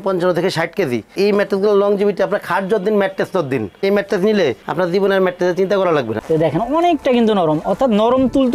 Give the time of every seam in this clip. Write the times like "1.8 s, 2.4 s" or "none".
3.8 s, 6.2 s

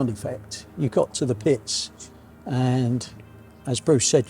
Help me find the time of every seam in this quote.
none

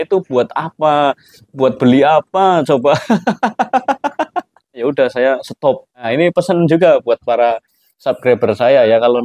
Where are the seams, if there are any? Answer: 4.8 s, 6.1 s

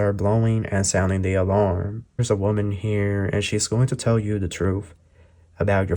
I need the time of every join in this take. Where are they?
2.2 s

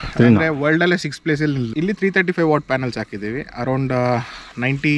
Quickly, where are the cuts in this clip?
1.7 s

